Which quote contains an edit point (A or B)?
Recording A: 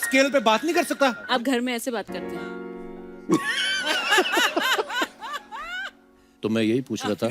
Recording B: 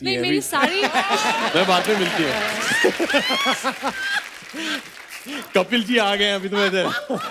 A